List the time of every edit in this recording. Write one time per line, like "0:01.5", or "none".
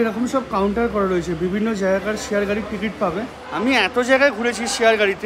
0:03.4